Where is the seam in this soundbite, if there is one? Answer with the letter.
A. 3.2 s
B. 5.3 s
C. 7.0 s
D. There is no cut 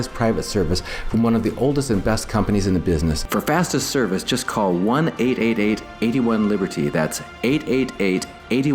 A